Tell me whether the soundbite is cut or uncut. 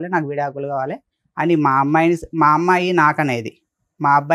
uncut